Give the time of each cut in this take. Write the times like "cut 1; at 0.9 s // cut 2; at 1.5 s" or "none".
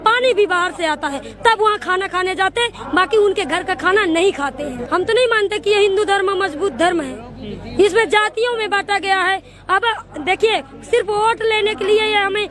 cut 1; at 4.8 s